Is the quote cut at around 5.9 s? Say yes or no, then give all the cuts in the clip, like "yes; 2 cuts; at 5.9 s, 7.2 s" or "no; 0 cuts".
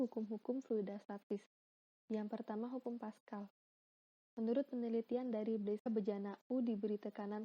yes; 1 cut; at 5.9 s